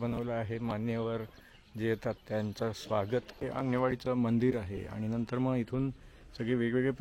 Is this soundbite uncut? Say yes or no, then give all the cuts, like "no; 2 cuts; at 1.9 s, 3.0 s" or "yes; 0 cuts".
no; 1 cut; at 3.4 s